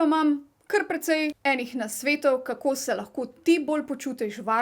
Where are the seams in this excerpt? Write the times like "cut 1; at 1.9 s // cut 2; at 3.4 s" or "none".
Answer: cut 1; at 1.4 s